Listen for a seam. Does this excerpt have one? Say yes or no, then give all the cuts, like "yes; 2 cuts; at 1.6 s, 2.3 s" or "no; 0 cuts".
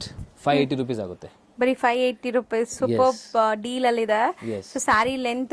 no; 0 cuts